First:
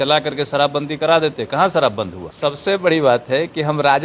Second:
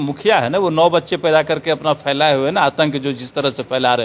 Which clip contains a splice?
first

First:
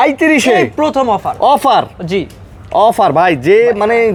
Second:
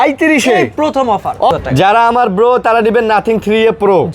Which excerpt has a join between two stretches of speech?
second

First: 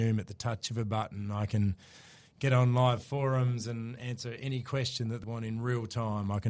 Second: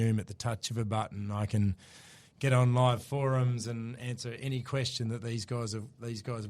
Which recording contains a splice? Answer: first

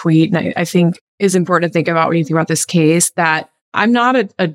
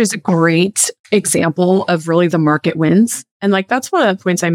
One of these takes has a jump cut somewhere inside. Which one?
first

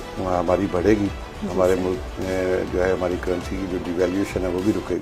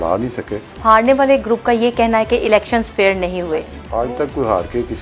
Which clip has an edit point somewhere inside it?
second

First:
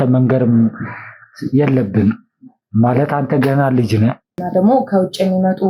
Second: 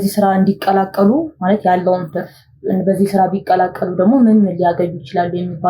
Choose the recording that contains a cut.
first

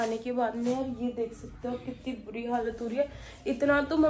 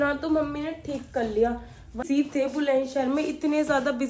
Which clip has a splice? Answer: second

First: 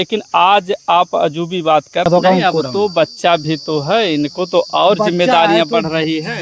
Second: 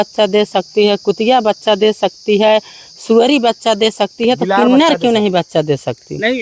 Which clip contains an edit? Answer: first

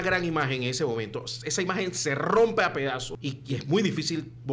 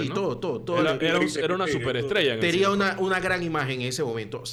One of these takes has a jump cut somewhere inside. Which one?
first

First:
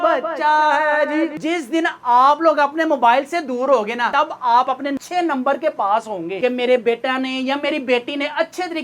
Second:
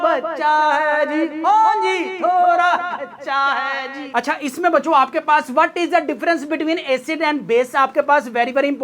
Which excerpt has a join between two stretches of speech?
first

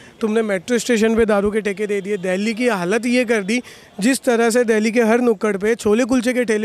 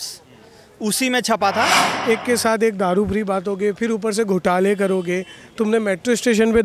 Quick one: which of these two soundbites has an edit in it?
second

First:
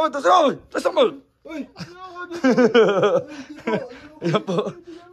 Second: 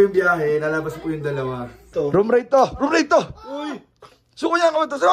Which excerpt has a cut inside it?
second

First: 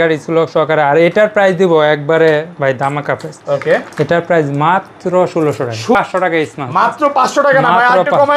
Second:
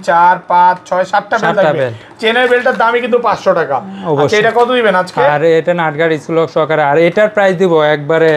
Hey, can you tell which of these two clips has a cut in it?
first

